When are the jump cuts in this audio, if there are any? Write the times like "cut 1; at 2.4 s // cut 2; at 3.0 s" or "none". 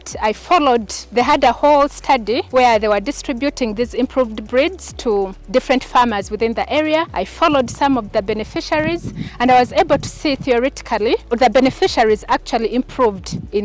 cut 1; at 1.0 s // cut 2; at 2.4 s // cut 3; at 5.4 s // cut 4; at 7.2 s // cut 5; at 11.3 s